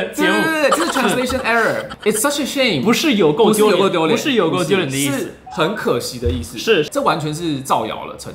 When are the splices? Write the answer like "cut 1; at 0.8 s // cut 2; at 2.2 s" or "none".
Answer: cut 1; at 1.9 s // cut 2; at 6.9 s